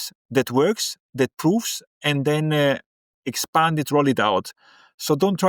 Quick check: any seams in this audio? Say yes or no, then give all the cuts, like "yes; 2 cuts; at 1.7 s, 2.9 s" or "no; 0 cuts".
no; 0 cuts